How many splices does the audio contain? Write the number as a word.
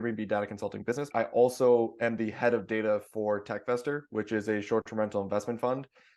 one